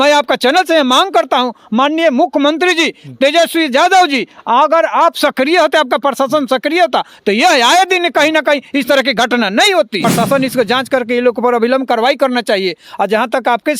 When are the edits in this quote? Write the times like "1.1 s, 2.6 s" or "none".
10.1 s